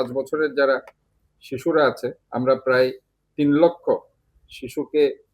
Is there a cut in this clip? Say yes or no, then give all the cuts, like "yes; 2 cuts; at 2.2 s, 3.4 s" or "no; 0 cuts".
yes; 1 cut; at 2.2 s